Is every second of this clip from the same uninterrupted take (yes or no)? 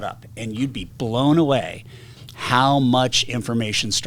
yes